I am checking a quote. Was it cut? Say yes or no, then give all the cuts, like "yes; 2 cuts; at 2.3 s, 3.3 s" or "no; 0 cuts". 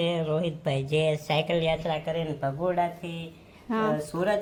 no; 0 cuts